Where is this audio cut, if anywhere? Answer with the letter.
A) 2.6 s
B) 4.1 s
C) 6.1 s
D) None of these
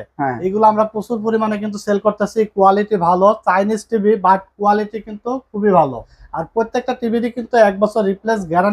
C